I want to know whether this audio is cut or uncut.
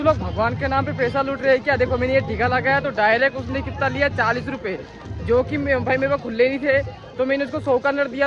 uncut